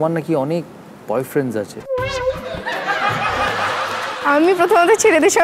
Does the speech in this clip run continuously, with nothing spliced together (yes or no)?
no